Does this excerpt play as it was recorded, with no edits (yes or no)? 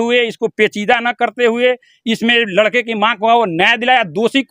yes